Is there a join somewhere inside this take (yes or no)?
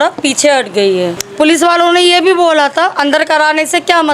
yes